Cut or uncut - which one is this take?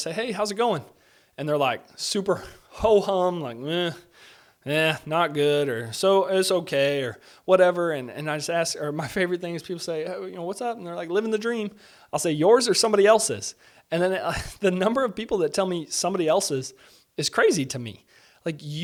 uncut